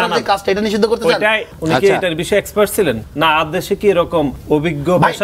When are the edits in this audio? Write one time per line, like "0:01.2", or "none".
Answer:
0:01.5
0:03.1
0:04.4